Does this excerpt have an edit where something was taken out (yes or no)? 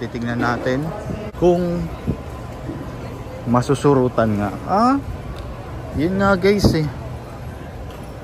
yes